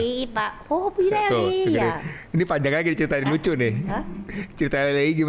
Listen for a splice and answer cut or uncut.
uncut